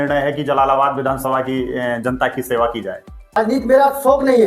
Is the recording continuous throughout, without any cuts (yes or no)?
no